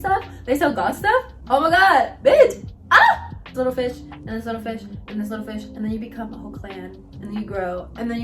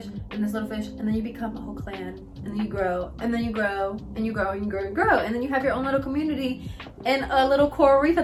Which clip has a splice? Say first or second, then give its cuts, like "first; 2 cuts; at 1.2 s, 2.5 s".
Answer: first; 1 cut; at 3.5 s